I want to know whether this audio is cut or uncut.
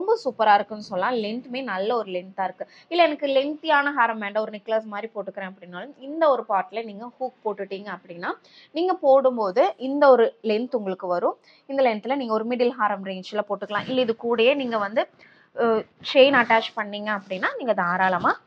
uncut